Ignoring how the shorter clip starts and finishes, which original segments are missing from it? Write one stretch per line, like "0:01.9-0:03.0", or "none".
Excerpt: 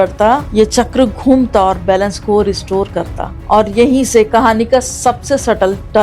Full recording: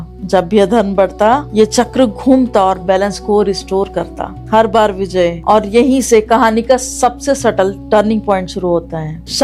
0:04.4-0:05.4